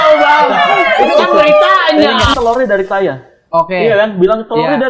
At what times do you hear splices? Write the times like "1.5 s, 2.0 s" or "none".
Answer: 2.3 s